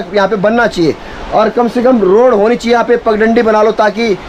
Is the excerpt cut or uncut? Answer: uncut